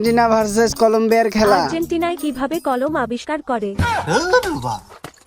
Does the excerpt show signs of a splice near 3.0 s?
no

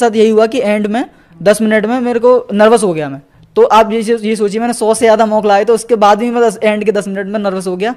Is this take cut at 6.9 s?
no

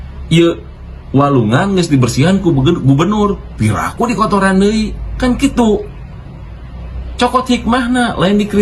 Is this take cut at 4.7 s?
no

